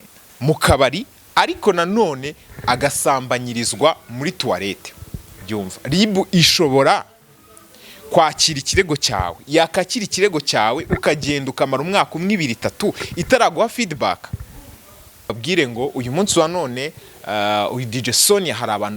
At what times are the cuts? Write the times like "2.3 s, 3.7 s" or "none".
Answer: 5.5 s, 15.4 s

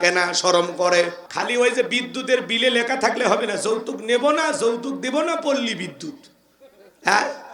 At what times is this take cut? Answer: 1.2 s

